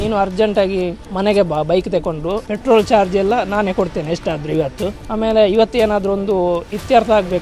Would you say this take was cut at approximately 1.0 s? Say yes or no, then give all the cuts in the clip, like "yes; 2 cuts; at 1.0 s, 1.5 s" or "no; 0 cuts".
yes; 3 cuts; at 1.0 s, 2.5 s, 5.0 s